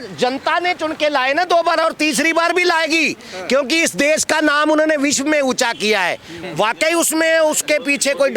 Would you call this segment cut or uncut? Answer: cut